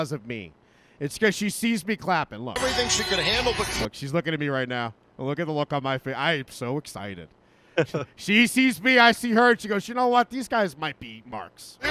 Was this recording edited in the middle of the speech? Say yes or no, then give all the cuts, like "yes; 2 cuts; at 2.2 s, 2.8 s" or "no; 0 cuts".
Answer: yes; 1 cut; at 2.5 s